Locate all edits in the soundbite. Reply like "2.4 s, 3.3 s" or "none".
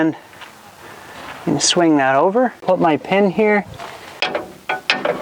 2.6 s, 3.9 s